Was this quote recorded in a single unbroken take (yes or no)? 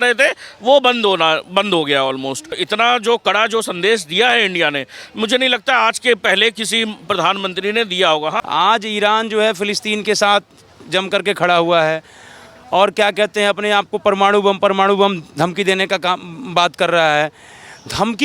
no